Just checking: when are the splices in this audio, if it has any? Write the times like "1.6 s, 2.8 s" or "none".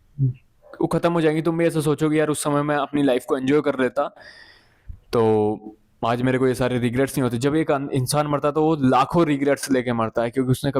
none